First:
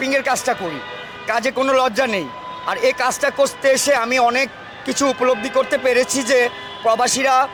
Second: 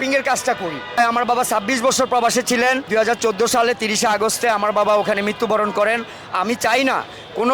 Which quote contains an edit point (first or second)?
second